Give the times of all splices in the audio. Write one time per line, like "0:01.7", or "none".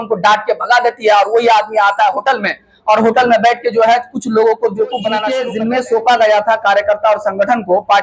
0:05.4